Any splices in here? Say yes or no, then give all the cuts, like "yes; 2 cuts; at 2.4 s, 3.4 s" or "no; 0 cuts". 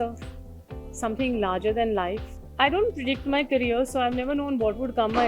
yes; 1 cut; at 2.3 s